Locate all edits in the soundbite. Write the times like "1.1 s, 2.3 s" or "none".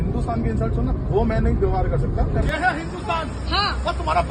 2.5 s